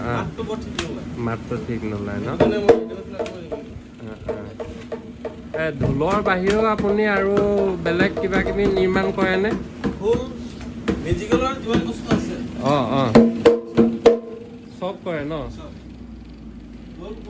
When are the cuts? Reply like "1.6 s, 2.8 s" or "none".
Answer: none